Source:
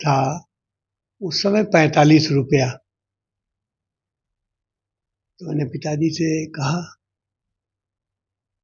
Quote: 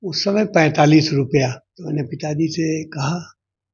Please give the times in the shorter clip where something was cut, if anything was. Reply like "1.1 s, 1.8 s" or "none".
1.7 s